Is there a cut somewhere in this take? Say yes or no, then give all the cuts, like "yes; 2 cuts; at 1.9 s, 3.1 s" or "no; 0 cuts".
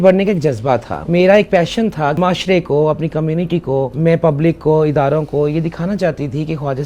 yes; 3 cuts; at 1.0 s, 2.2 s, 3.9 s